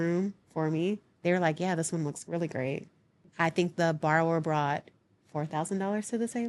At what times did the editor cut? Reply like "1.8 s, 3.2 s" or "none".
3.2 s